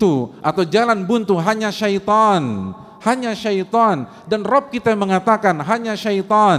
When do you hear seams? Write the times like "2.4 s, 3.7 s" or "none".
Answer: none